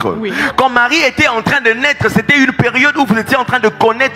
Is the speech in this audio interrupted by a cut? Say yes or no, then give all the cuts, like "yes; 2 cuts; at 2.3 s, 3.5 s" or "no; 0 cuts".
no; 0 cuts